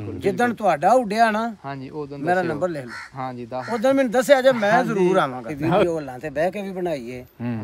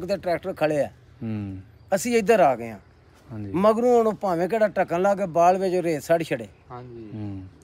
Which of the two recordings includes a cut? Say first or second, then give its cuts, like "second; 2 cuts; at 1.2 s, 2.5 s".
first; 1 cut; at 5.8 s